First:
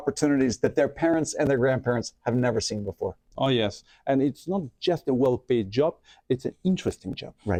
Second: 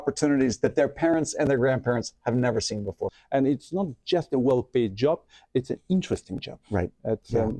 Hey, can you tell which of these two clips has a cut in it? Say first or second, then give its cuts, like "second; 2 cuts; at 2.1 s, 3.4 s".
second; 1 cut; at 3.2 s